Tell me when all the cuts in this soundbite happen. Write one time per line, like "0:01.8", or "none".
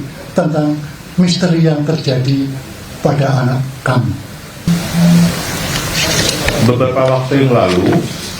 0:04.7